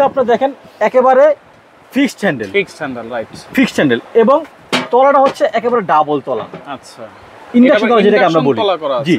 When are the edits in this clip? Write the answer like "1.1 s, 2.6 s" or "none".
none